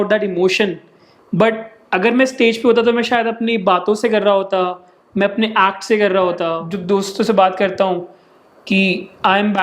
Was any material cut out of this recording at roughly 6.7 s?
yes; 1 cut; at 6.7 s

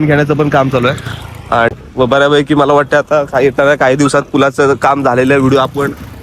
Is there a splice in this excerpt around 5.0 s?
no; 1 cut; at 1.7 s

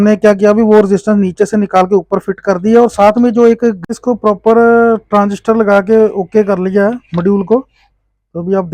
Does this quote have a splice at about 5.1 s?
no; 1 cut; at 3.8 s

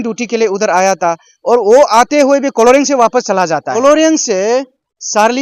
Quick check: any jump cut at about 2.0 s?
no; 1 cut; at 3.7 s

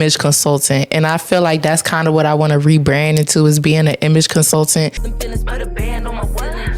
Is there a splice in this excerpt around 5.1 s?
yes; 1 cut; at 5.1 s

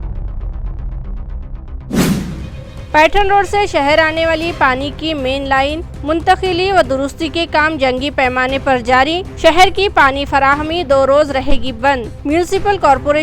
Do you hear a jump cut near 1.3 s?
no; 1 cut; at 2.5 s

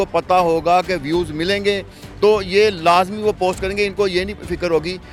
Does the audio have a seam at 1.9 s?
no; 0 cuts

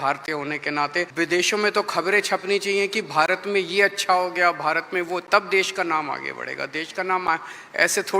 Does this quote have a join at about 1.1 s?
yes; 1 cut; at 1.1 s

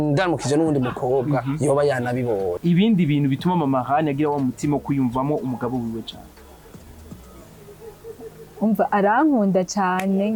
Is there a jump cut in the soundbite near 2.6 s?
yes; 1 cut; at 2.6 s

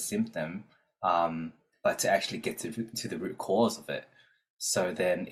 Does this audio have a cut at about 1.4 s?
no; 0 cuts

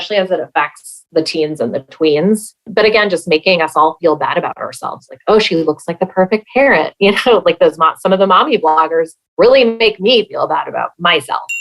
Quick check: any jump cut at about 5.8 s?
no; 1 cut; at 2.6 s

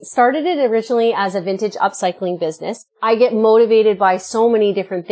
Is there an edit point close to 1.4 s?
no; 1 cut; at 2.8 s

